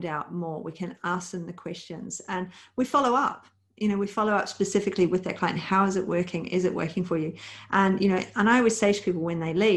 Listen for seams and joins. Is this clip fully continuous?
yes; 0 cuts

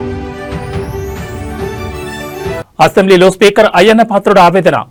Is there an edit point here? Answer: no; 0 cuts

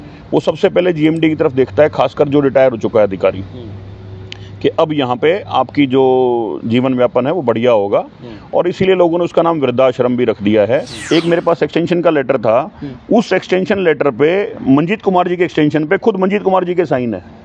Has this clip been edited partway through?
yes; 1 cut; at 10.9 s

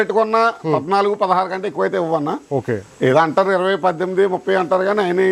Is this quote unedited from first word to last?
yes; 0 cuts

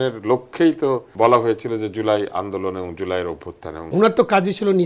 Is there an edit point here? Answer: yes; 2 cuts; at 1.1 s, 3.8 s

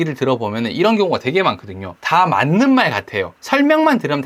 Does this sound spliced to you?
no; 0 cuts

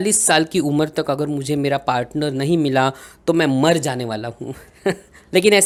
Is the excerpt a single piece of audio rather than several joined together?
yes; 0 cuts

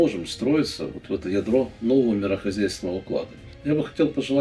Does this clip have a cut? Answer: yes; 1 cut; at 3.4 s

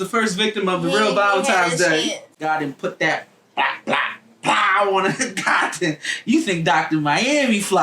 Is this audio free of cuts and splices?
no; 1 cut; at 2.4 s

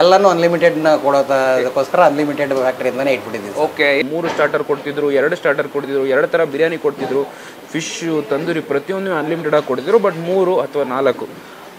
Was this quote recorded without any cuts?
no; 1 cut; at 4.0 s

